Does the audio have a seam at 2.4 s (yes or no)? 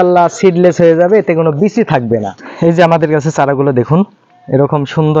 yes